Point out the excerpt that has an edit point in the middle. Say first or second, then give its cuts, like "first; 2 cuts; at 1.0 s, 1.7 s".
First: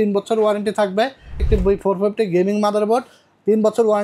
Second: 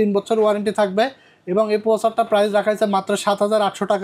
first; 1 cut; at 1.4 s